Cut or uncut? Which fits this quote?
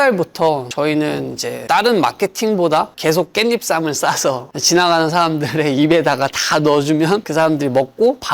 cut